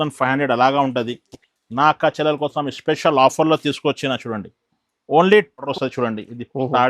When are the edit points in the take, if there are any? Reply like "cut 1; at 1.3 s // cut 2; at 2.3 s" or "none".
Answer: cut 1; at 5.7 s

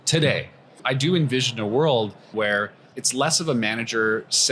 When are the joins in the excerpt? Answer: cut 1; at 0.8 s // cut 2; at 2.3 s

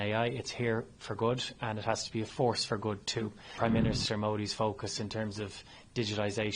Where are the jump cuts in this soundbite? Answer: cut 1; at 3.4 s

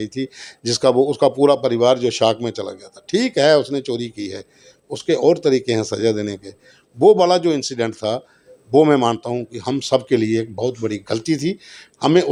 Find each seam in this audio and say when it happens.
none

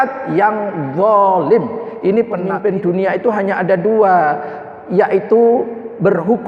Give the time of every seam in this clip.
cut 1; at 2.4 s

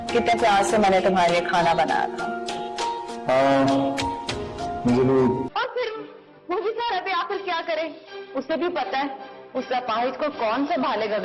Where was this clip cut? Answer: cut 1; at 5.5 s

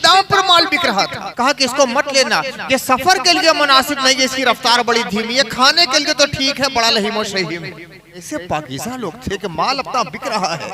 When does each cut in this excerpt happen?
cut 1; at 1.2 s // cut 2; at 8.2 s

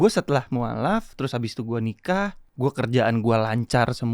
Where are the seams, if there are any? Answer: cut 1; at 2.4 s

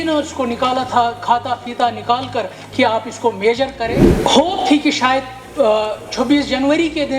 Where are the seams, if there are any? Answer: cut 1; at 4.1 s

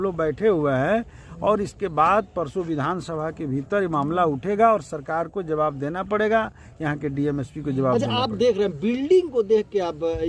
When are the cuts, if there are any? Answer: none

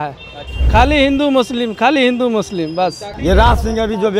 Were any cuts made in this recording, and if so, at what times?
cut 1; at 3.1 s

